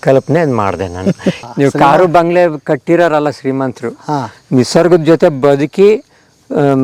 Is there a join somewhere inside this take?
yes; 1 cut; at 1.4 s

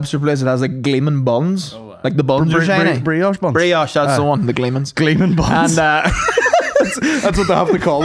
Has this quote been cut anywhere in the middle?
no; 0 cuts

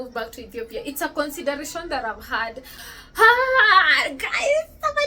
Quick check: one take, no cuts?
no; 1 cut; at 2.7 s

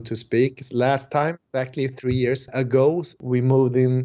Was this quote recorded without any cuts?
no; 3 cuts; at 1.4 s, 2.5 s, 3.2 s

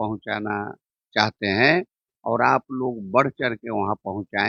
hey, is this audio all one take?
yes; 0 cuts

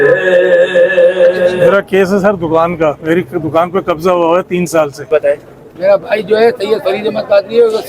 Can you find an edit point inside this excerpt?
yes; 2 cuts; at 1.7 s, 5.5 s

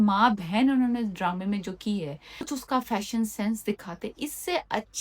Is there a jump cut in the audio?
yes; 1 cut; at 2.5 s

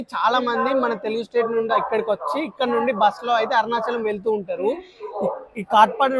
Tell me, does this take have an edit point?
no; 0 cuts

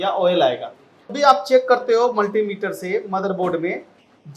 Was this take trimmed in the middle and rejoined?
yes; 1 cut; at 1.1 s

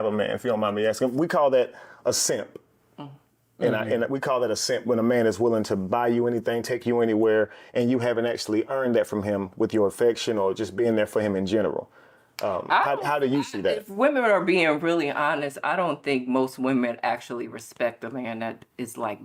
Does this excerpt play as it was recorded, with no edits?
yes; 0 cuts

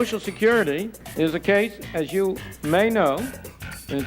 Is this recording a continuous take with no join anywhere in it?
no; 2 cuts; at 1.0 s, 2.5 s

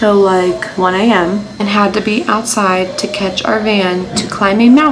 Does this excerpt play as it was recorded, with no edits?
yes; 0 cuts

